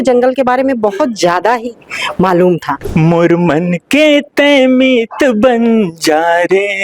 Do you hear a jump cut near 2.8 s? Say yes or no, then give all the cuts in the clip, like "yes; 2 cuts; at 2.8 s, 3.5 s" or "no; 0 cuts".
yes; 1 cut; at 2.8 s